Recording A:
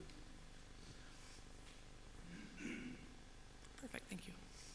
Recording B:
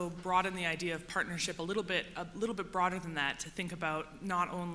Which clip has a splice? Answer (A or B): B